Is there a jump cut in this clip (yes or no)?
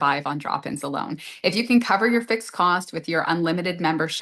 no